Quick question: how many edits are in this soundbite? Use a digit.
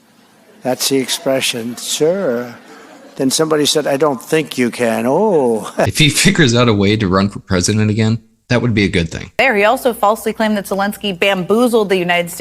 3